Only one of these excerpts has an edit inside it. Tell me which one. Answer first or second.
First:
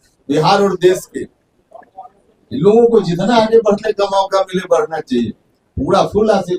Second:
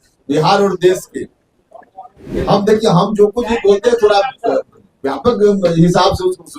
second